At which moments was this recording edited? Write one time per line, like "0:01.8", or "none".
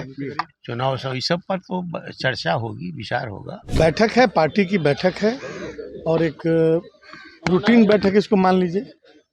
0:03.6